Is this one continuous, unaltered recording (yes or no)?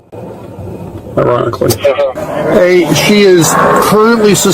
no